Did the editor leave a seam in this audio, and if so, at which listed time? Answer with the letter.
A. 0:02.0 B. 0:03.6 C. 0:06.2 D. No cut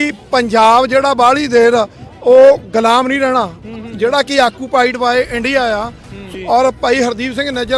C